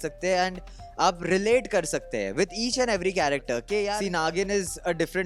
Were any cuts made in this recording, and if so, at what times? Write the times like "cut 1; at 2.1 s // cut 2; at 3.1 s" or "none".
cut 1; at 4.0 s